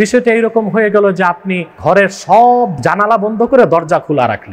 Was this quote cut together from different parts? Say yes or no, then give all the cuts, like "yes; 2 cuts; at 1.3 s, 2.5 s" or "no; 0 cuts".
yes; 1 cut; at 1.8 s